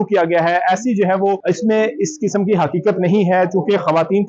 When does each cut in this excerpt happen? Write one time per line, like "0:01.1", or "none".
0:01.4